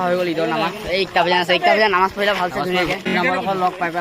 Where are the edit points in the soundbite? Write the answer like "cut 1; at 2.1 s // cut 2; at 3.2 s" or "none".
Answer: cut 1; at 3.1 s